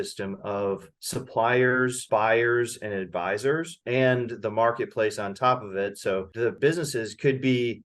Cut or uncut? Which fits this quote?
cut